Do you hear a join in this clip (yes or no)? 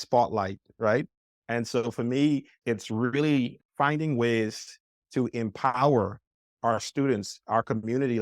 yes